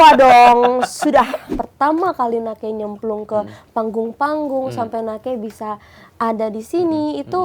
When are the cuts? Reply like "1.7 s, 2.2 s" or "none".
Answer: 1.4 s